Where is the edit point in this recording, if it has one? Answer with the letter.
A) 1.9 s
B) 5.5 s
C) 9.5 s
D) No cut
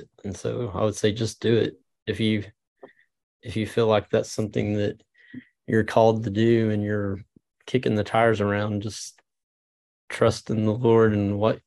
D